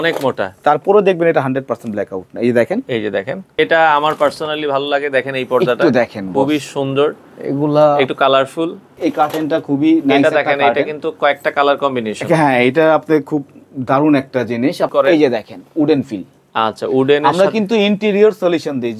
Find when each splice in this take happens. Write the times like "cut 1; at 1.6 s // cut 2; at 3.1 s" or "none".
cut 1; at 3.5 s // cut 2; at 8.9 s // cut 3; at 14.9 s